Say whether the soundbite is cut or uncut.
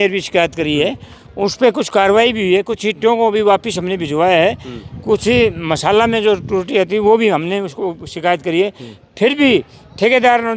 uncut